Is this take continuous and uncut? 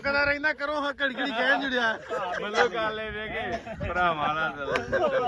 yes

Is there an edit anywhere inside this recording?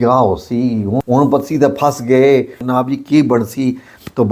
yes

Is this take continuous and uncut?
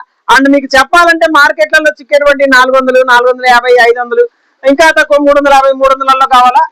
yes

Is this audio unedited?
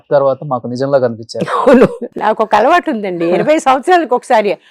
no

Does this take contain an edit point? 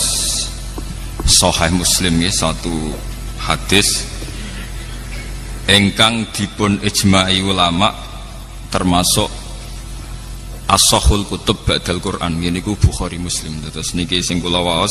no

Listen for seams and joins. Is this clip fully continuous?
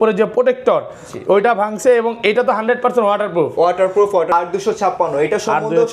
no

